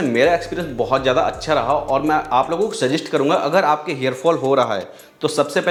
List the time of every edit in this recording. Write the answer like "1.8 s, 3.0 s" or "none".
none

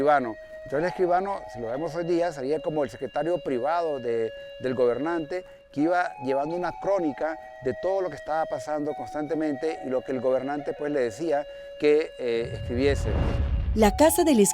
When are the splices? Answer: none

